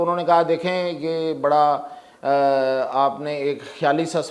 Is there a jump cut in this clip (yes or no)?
no